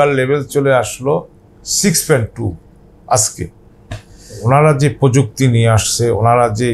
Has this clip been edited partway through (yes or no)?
yes